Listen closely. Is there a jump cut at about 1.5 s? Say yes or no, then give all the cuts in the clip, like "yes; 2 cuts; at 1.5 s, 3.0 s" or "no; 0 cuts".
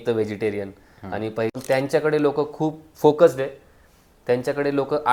yes; 1 cut; at 1.5 s